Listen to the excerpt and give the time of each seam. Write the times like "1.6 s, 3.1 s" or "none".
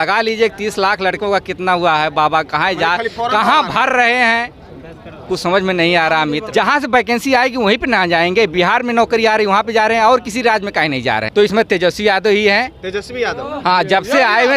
6.4 s